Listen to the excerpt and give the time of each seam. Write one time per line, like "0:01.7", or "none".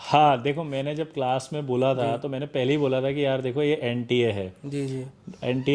none